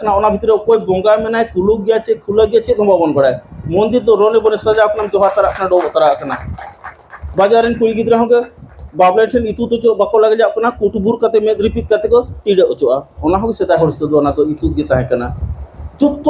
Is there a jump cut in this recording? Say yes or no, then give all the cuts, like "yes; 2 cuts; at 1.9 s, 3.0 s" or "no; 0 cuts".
no; 0 cuts